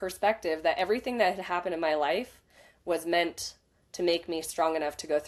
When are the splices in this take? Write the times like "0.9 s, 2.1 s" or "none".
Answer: none